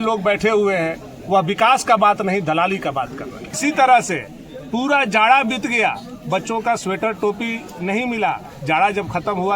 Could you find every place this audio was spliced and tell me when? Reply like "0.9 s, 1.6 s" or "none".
3.6 s